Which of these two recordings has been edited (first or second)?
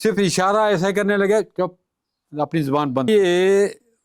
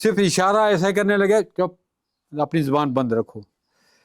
first